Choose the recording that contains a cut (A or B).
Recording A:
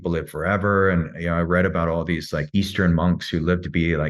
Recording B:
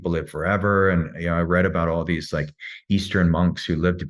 A